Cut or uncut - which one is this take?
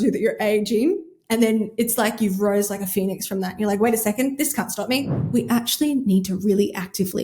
cut